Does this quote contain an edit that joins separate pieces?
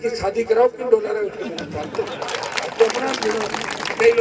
no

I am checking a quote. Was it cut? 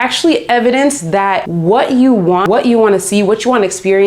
yes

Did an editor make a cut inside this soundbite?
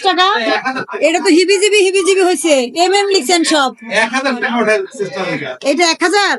no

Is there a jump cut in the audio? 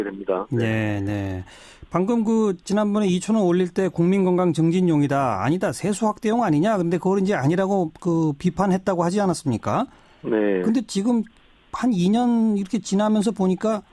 yes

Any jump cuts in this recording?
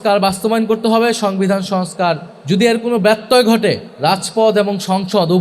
yes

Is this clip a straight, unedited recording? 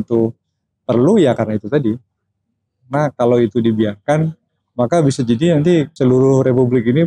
no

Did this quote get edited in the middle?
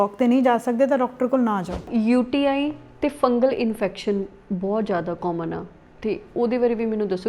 yes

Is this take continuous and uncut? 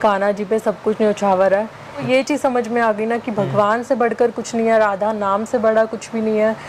no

